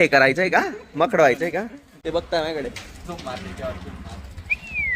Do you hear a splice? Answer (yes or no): no